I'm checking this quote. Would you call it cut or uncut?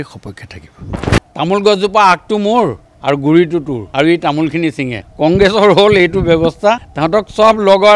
cut